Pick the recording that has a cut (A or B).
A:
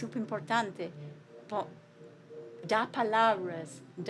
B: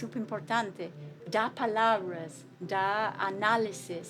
B